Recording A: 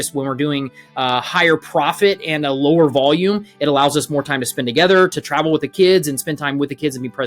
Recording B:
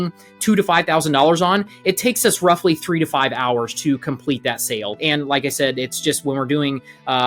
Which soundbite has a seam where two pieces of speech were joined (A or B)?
B